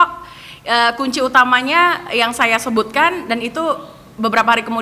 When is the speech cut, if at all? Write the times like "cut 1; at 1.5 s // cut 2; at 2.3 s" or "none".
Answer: none